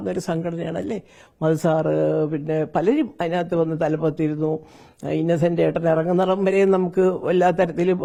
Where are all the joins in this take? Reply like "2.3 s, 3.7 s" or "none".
none